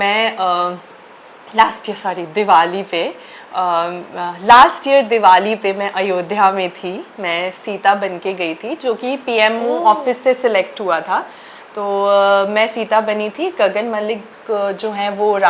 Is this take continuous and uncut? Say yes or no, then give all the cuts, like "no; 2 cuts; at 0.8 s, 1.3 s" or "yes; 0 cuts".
yes; 0 cuts